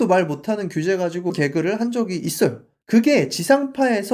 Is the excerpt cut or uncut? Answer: cut